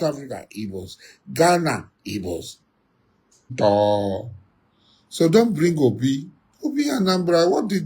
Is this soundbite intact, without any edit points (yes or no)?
no